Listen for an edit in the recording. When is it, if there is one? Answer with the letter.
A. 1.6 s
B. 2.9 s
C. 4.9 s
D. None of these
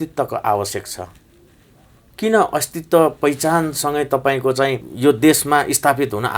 C